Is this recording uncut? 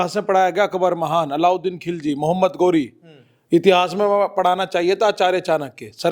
yes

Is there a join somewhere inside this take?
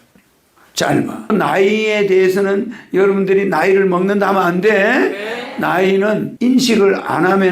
yes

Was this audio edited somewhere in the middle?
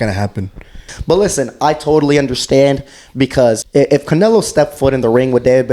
yes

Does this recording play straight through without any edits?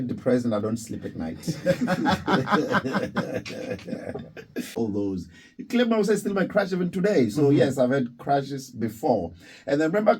no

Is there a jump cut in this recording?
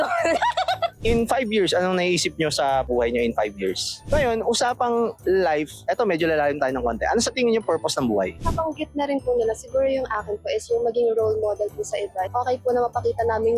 yes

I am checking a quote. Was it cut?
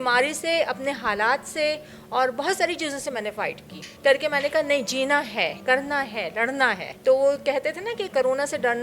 no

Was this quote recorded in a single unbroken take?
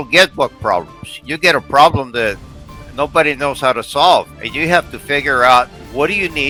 yes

